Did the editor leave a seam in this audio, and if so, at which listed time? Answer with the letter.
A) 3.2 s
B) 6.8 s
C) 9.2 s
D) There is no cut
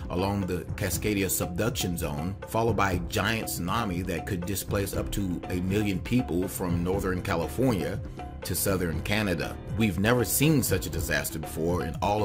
B